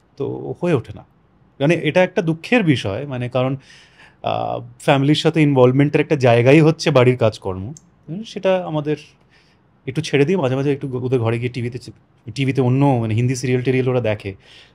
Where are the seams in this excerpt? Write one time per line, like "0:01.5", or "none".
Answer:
none